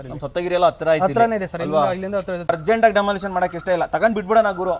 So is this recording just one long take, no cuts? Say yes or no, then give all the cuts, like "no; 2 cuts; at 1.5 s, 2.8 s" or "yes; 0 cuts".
no; 1 cut; at 2.5 s